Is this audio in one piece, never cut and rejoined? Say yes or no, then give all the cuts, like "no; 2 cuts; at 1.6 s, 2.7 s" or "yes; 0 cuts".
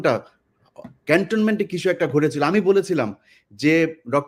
yes; 0 cuts